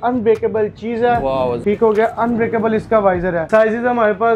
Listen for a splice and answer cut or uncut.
cut